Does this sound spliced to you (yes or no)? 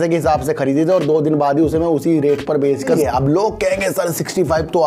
yes